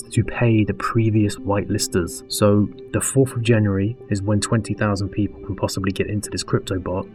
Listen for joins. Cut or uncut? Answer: uncut